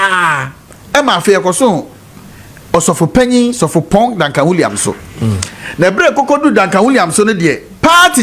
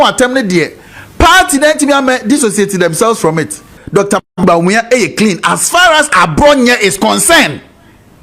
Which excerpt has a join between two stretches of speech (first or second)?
second